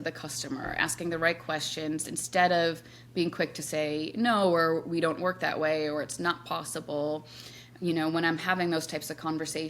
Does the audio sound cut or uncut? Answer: uncut